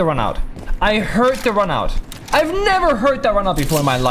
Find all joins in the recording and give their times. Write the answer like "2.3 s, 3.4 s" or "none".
none